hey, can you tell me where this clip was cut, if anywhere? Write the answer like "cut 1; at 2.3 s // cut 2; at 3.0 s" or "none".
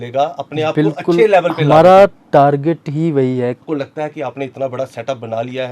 cut 1; at 3.6 s